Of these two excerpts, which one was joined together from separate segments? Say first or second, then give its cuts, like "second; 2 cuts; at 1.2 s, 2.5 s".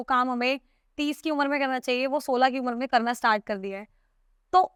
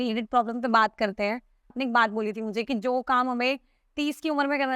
second; 1 cut; at 1.8 s